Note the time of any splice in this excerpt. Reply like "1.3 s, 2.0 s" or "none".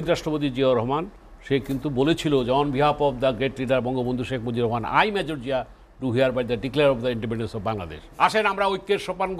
8.1 s

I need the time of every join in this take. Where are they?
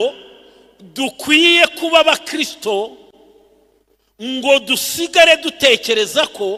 none

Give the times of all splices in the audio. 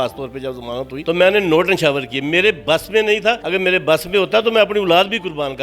0.9 s, 3.4 s

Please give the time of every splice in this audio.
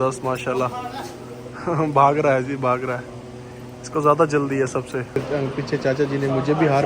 5.2 s

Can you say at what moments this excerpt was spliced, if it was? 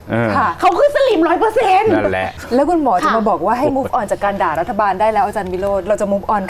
2.3 s

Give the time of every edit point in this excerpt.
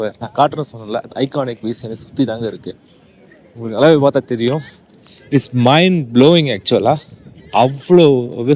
none

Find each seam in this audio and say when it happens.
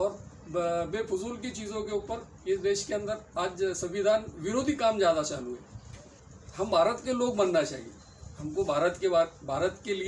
6.2 s

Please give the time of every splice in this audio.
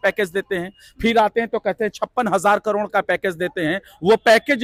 none

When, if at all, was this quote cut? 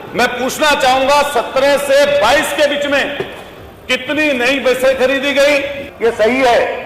5.8 s

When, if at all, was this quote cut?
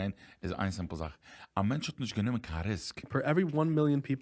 3.1 s

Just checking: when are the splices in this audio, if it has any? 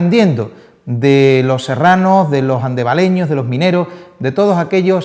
1.1 s

